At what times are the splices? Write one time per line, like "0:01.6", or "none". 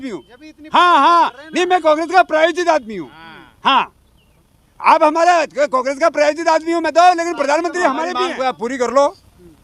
0:08.3

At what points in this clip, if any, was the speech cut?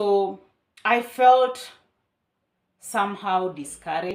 none

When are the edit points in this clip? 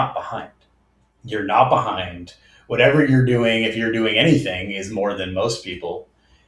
0:01.5

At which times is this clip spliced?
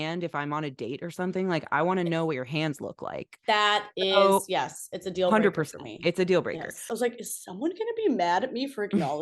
0:06.9

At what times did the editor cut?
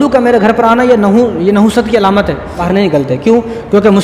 0:02.6

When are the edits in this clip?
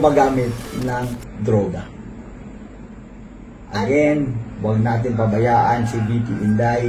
0:03.2

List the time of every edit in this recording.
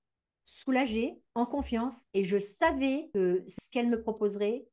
0:01.7
0:03.1

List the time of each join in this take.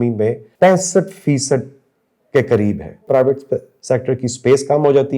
0:03.0

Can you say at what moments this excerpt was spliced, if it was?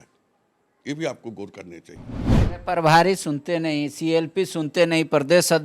0:02.3

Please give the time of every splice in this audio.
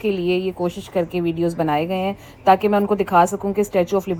none

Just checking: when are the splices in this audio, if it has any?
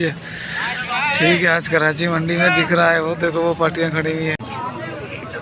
0:04.4

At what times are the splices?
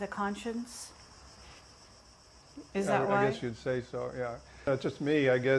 0:04.7

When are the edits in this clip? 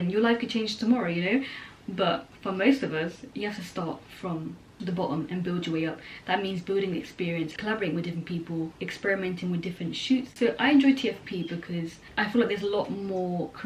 none

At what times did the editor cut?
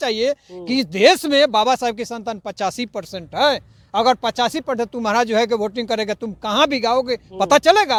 none

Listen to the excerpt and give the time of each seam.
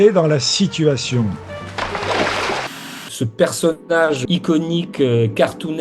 0:03.0
0:04.2

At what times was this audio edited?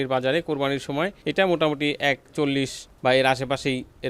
0:02.8

